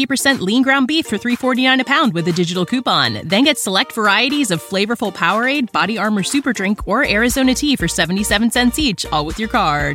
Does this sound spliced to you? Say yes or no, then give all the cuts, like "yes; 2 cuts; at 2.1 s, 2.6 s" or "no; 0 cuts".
no; 0 cuts